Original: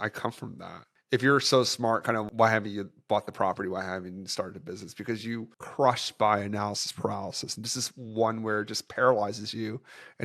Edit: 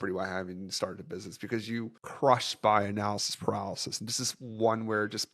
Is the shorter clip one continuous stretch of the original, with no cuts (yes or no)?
yes